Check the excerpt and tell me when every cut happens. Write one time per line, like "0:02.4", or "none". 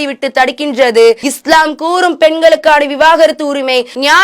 0:01.3